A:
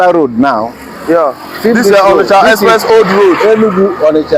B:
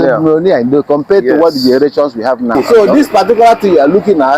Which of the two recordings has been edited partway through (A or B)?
B